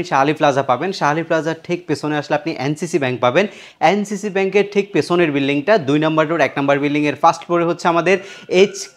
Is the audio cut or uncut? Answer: uncut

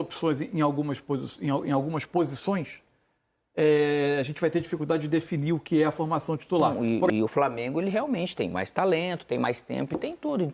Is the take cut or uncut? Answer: cut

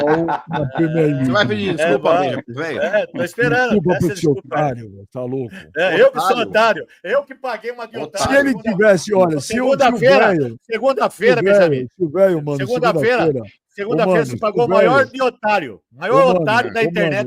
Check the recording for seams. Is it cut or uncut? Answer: uncut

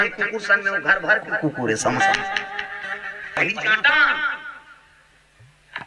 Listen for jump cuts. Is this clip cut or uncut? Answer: cut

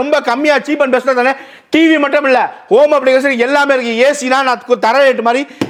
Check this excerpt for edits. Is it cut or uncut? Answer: uncut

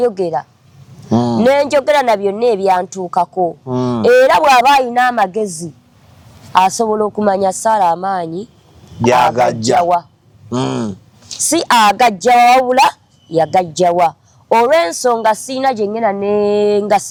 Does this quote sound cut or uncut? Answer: uncut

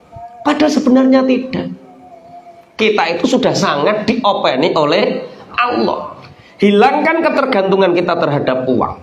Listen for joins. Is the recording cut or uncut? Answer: uncut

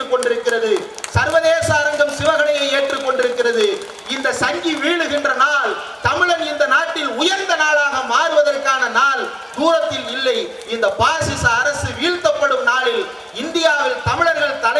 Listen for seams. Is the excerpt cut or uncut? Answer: uncut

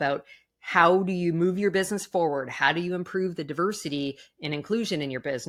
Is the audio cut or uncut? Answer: uncut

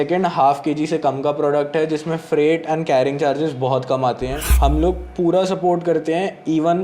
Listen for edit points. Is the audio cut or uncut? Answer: cut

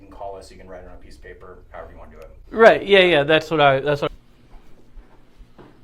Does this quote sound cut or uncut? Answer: cut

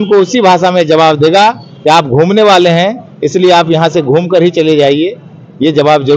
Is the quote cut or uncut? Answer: uncut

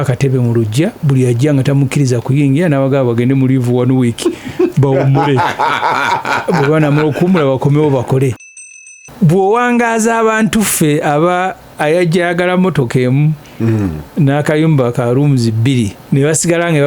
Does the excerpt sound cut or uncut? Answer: cut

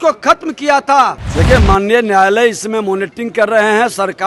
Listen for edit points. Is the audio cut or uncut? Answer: cut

